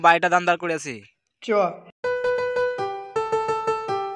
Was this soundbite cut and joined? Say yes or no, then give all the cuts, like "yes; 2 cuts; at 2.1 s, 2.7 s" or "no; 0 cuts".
no; 0 cuts